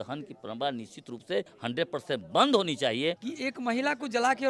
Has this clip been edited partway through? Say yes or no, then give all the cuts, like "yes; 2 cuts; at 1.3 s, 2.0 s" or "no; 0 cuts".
yes; 2 cuts; at 1.5 s, 3.3 s